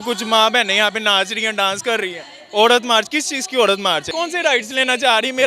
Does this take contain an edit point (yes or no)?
yes